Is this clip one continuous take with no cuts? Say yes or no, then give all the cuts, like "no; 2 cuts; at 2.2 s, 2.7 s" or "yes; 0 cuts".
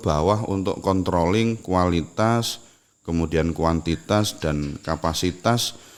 yes; 0 cuts